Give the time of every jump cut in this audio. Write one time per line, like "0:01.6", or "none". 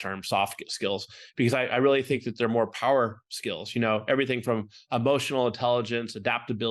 none